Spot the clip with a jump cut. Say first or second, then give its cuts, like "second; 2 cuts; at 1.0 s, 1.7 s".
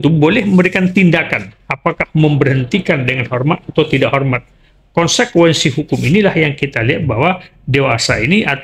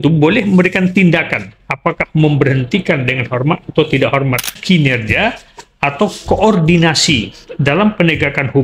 second; 1 cut; at 4.6 s